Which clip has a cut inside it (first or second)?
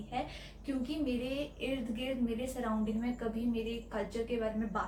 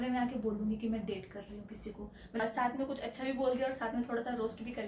second